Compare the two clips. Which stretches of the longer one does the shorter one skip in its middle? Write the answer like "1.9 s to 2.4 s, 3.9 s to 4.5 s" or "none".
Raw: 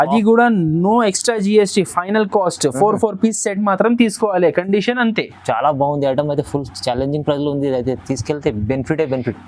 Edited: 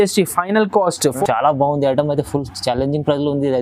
2.8 s to 5.4 s